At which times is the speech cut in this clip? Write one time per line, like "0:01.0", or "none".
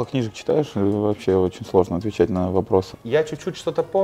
0:02.9

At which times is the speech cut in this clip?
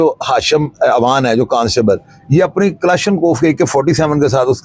none

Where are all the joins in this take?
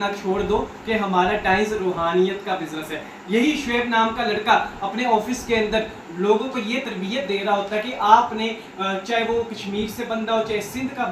none

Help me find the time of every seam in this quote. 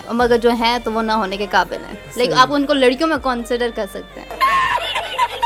none

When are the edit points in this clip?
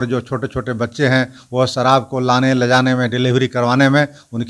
none

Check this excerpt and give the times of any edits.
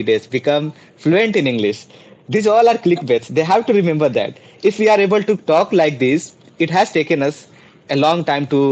none

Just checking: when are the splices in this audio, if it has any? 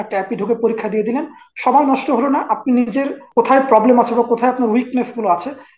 0:03.2

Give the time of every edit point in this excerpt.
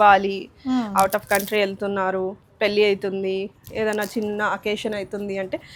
none

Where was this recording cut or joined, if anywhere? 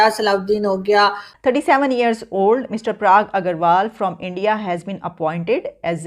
0:01.3

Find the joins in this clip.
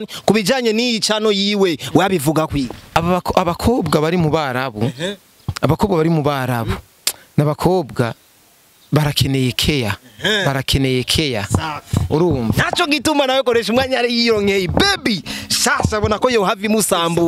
0:02.8

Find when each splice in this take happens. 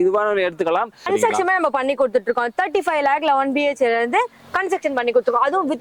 0:01.1

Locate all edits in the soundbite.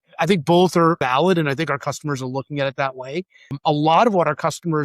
0:01.0
0:03.6

